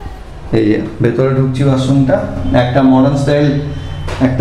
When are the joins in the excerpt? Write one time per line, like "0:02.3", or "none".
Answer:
none